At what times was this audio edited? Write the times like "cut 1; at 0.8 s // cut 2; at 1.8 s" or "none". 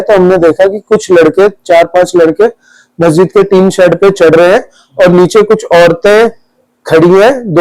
none